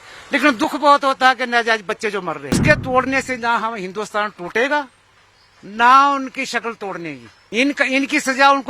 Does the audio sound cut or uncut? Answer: cut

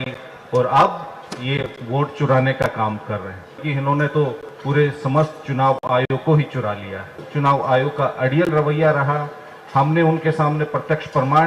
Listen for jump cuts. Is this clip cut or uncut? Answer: cut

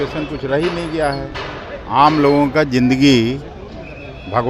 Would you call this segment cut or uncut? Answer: uncut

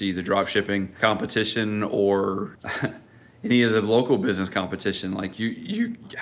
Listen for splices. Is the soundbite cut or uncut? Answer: cut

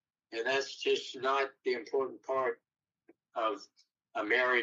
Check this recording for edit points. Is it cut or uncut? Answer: uncut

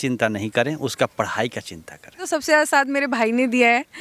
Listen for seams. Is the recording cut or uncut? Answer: cut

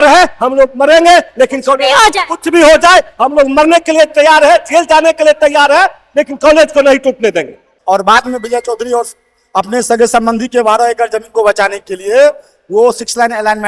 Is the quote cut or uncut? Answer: cut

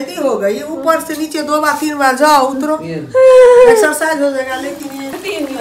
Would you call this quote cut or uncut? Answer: uncut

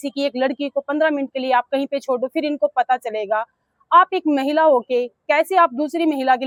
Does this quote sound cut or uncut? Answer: uncut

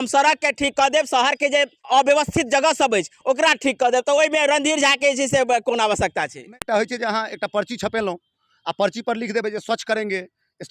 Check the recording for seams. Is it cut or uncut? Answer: cut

